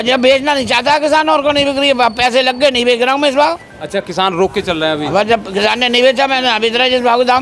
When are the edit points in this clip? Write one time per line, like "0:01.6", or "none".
none